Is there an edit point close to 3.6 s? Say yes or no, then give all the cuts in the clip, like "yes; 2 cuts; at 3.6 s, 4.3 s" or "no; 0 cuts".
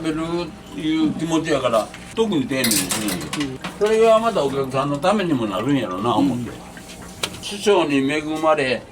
yes; 3 cuts; at 2.1 s, 3.6 s, 7.4 s